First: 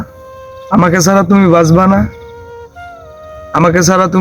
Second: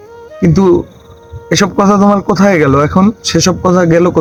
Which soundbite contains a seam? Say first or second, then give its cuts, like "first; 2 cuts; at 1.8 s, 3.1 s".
first; 2 cuts; at 2.1 s, 3.5 s